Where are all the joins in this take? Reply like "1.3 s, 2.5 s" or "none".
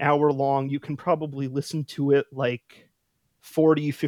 none